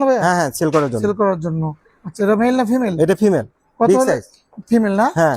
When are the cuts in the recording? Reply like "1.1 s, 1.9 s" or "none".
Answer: none